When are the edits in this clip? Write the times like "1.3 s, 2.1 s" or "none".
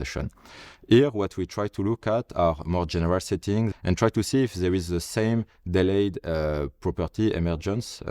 3.7 s